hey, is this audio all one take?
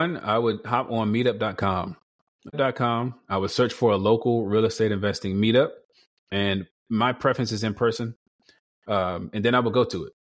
no; 1 cut; at 2.5 s

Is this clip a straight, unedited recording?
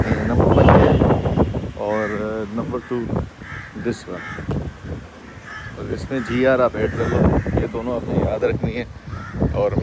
yes; 0 cuts

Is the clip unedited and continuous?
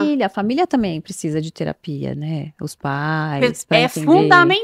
yes; 0 cuts

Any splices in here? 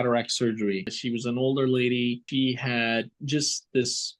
yes; 2 cuts; at 0.9 s, 2.2 s

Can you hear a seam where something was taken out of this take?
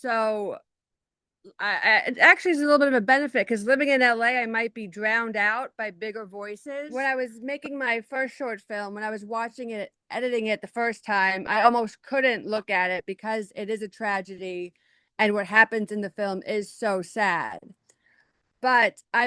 yes; 1 cut; at 6.9 s

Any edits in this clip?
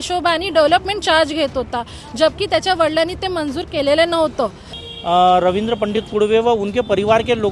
yes; 1 cut; at 4.7 s

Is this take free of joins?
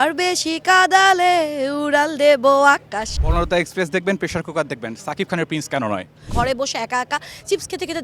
no; 2 cuts; at 3.0 s, 6.2 s

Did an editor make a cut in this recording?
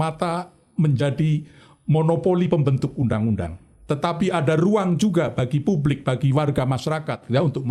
no; 0 cuts

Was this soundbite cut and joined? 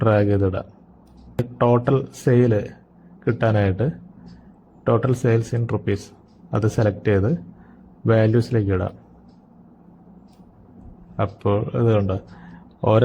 yes; 1 cut; at 1.4 s

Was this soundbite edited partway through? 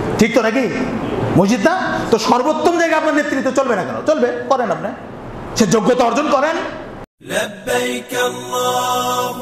yes; 1 cut; at 7.1 s

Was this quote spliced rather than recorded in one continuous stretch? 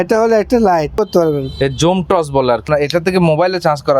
yes; 2 cuts; at 1.0 s, 2.7 s

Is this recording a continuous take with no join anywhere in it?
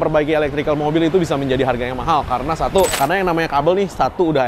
no; 1 cut; at 2.9 s

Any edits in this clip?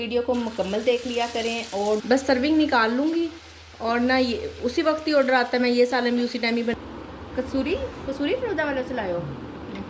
yes; 2 cuts; at 2.0 s, 6.7 s

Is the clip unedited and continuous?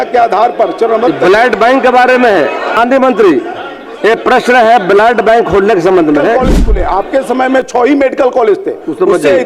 no; 2 cuts; at 2.7 s, 6.6 s

